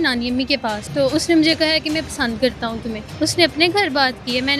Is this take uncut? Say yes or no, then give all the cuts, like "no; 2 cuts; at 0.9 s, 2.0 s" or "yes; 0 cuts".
no; 2 cuts; at 0.8 s, 3.0 s